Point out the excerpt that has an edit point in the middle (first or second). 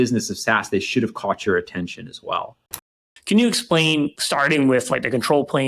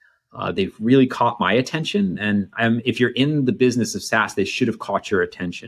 first